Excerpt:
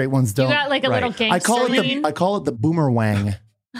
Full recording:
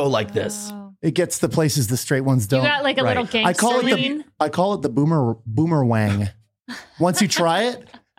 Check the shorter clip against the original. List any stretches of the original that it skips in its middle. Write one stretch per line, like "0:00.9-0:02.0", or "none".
0:04.5-0:05.3